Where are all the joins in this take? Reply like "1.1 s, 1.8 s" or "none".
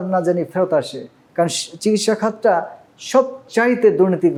none